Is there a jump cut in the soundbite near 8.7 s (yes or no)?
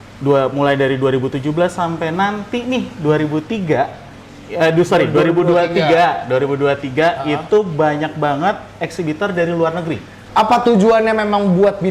no